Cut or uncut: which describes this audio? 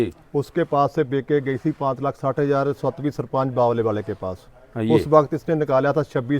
uncut